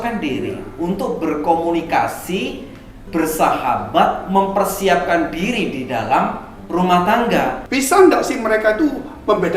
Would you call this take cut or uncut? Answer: cut